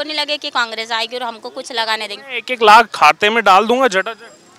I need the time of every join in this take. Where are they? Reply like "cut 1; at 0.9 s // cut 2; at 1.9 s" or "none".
none